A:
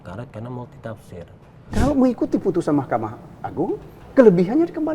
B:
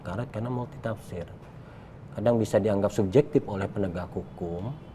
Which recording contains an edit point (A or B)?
A